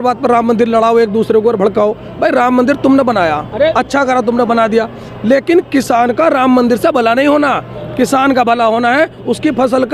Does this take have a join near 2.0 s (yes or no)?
no